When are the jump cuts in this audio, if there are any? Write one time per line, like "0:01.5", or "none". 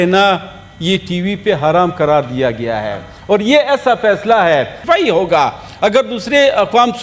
0:04.8